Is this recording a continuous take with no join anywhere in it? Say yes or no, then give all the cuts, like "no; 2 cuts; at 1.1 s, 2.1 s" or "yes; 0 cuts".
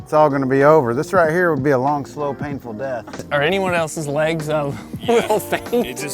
yes; 0 cuts